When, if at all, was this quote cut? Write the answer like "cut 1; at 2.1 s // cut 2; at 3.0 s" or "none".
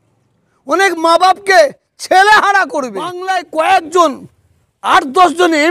cut 1; at 3.2 s